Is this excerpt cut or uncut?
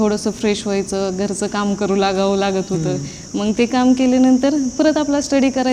uncut